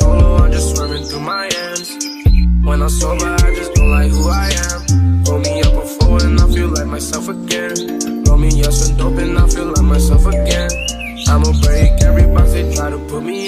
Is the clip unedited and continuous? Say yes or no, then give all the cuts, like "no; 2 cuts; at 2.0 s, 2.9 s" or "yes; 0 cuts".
yes; 0 cuts